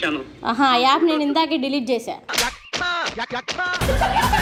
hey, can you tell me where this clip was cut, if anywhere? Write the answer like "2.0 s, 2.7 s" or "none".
none